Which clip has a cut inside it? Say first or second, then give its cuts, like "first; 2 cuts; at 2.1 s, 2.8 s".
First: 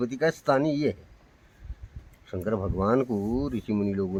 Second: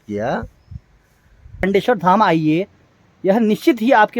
second; 1 cut; at 1.6 s